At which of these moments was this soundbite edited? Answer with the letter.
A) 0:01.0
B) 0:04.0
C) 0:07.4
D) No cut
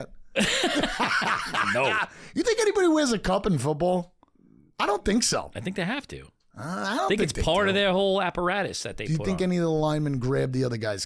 D